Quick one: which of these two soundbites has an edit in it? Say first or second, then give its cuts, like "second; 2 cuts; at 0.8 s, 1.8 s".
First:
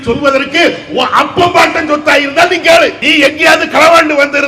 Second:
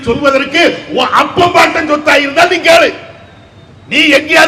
first; 1 cut; at 3.0 s